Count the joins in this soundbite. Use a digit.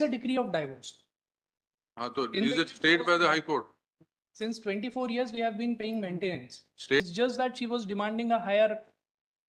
1